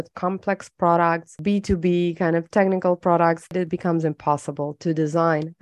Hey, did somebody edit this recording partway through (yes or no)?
yes